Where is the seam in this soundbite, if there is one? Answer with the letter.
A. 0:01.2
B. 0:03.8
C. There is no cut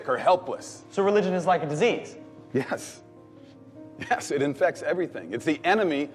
A